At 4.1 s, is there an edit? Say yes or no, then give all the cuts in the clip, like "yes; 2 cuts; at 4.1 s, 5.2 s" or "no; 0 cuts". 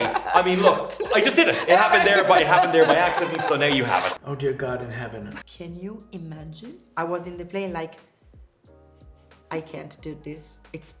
yes; 2 cuts; at 4.1 s, 5.4 s